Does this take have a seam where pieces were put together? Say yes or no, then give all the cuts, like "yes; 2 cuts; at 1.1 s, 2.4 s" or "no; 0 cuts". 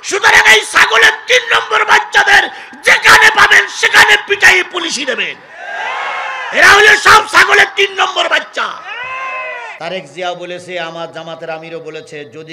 yes; 1 cut; at 9.7 s